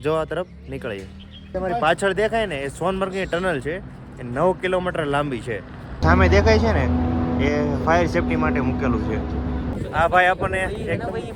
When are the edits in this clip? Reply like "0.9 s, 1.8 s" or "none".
1.5 s, 6.0 s, 9.7 s